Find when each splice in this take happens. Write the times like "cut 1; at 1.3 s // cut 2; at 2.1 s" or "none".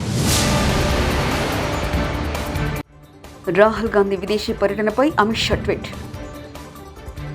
cut 1; at 2.9 s